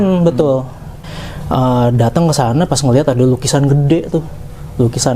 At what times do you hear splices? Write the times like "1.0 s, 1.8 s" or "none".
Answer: 1.1 s